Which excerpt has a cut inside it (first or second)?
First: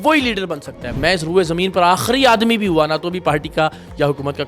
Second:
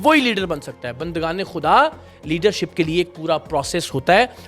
first